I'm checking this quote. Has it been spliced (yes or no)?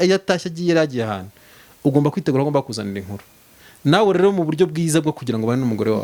no